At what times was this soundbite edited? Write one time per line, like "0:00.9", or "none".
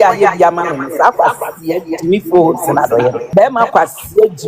0:03.2